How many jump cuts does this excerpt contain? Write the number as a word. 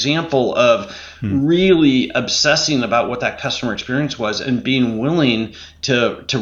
zero